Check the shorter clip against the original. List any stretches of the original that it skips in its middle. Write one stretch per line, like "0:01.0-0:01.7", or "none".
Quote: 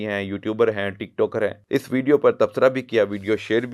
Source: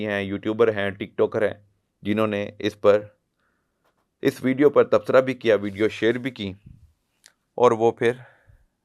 0:01.6-0:04.1